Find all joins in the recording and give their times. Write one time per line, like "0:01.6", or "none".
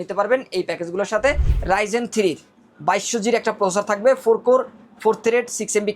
0:01.5